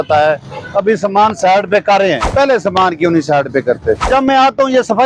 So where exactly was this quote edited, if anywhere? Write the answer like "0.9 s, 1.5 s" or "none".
2.3 s, 4.1 s